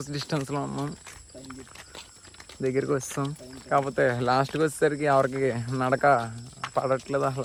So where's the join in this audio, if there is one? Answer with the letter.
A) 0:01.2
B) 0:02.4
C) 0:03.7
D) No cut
D